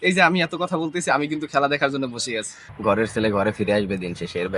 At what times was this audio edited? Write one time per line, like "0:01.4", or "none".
0:02.7